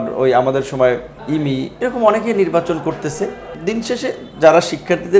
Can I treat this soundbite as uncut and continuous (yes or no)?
no